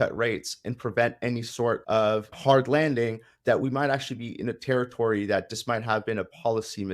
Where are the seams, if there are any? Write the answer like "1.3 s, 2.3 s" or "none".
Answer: 2.2 s